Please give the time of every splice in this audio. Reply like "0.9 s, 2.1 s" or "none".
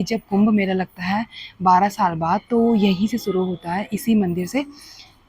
none